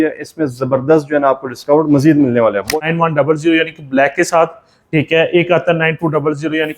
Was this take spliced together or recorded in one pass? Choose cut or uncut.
cut